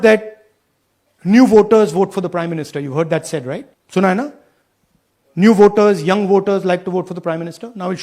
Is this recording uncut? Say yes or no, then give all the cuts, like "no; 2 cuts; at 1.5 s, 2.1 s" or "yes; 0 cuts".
no; 1 cut; at 3.7 s